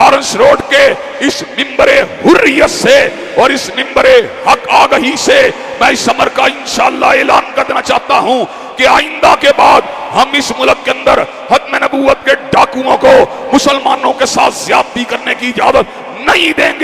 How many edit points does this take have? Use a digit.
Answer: 0